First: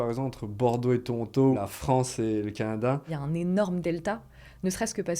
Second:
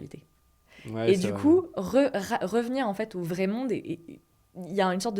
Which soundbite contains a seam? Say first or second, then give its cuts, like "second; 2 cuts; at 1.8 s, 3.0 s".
first; 2 cuts; at 1.6 s, 3.1 s